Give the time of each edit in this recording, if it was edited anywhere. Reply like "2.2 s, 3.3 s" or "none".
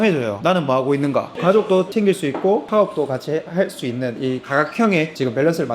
1.4 s